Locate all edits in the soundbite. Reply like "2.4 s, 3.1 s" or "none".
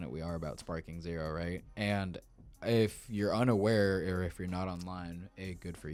none